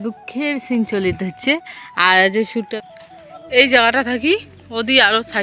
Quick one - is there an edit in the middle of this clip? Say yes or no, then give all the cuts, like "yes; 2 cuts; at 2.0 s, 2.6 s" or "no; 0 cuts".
yes; 1 cut; at 2.7 s